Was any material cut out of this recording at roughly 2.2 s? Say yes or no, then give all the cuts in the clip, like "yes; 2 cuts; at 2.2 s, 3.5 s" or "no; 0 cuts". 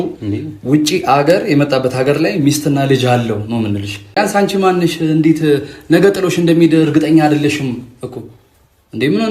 no; 1 cut; at 4.2 s